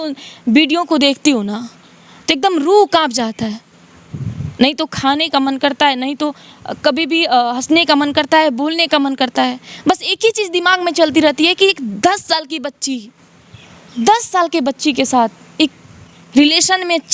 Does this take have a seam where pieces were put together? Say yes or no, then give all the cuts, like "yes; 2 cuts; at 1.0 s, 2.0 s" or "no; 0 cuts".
no; 0 cuts